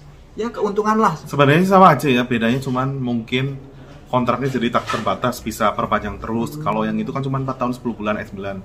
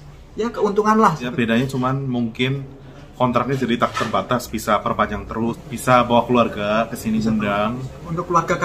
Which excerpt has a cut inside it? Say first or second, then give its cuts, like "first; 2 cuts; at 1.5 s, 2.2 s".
second; 2 cuts; at 1.3 s, 5.6 s